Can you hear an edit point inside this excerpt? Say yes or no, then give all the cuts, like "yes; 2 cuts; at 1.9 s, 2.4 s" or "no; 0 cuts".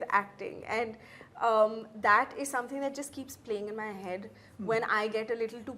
no; 0 cuts